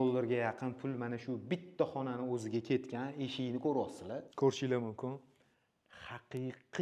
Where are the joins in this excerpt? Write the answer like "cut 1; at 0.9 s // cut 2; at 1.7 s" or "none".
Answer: cut 1; at 4.3 s